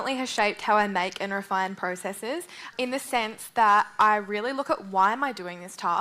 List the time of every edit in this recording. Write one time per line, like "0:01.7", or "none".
0:02.7